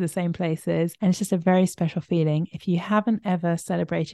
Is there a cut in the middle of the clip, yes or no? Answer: yes